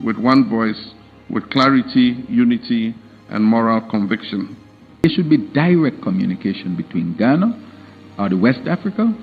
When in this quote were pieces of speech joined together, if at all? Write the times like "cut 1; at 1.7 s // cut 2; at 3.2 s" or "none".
cut 1; at 5.0 s